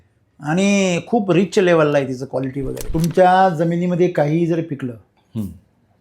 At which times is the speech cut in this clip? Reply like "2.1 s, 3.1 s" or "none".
2.8 s